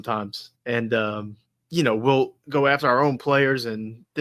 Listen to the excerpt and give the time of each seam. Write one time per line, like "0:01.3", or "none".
0:02.4